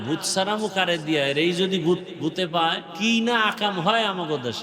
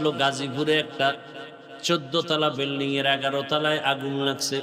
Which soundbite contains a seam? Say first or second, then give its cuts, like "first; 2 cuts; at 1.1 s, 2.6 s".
first; 1 cut; at 2.9 s